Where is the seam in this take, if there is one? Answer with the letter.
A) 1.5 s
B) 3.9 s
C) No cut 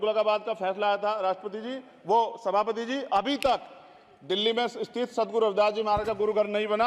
C